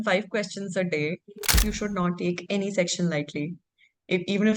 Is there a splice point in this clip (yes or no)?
yes